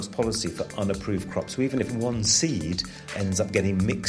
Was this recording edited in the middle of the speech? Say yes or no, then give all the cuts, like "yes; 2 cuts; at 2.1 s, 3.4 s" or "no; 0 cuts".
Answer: yes; 1 cut; at 3.0 s